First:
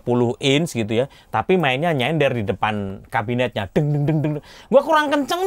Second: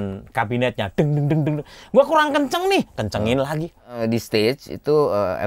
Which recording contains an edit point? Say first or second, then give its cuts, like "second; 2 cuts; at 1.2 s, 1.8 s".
second; 1 cut; at 3.9 s